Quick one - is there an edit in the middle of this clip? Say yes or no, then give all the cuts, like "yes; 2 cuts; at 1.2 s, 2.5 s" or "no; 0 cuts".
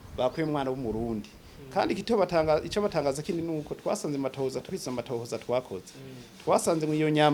no; 0 cuts